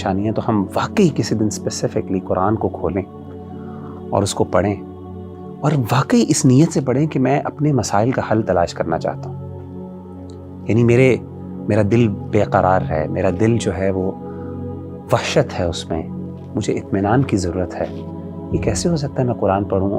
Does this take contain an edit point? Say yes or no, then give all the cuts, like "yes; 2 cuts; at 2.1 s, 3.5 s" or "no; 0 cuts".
no; 0 cuts